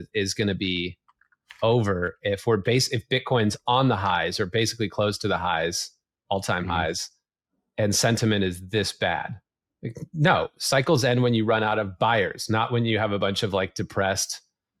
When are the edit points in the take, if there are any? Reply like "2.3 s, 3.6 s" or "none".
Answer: none